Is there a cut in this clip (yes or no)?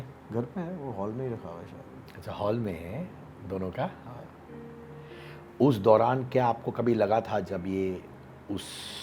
no